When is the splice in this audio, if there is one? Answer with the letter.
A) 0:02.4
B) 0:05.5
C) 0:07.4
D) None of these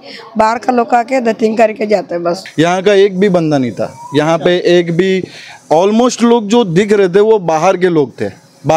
A